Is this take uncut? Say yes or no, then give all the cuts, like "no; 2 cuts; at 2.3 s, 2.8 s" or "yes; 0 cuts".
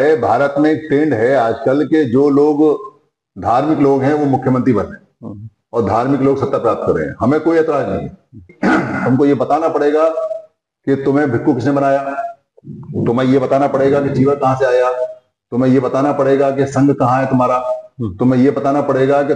no; 1 cut; at 8.5 s